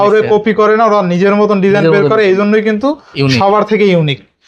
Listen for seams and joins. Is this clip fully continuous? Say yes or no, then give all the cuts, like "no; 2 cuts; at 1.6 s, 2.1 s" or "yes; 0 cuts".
yes; 0 cuts